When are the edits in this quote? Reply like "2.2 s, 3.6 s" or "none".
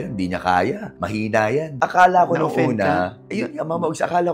1.7 s